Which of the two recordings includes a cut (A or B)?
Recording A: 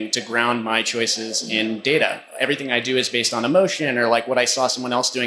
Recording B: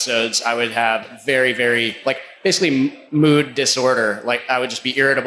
B